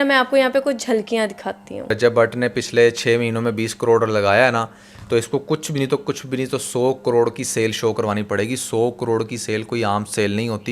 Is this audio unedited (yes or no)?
no